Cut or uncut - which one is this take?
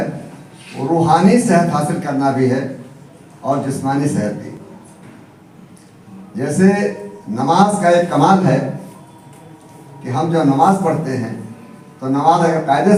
uncut